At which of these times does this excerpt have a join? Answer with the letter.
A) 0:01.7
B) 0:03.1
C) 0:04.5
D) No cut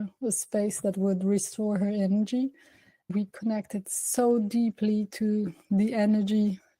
B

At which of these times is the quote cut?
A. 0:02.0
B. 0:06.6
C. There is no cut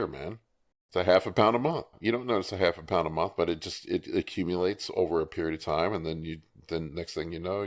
A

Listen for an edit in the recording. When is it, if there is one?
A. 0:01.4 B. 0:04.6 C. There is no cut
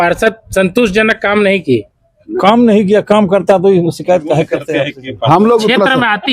B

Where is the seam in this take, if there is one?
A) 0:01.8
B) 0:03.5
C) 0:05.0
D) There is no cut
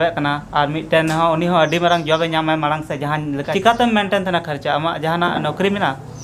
B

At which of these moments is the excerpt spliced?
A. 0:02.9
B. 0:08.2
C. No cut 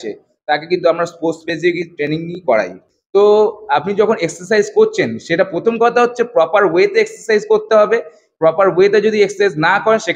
A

